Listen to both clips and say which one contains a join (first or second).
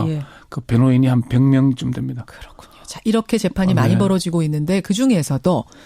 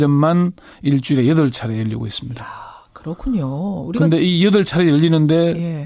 first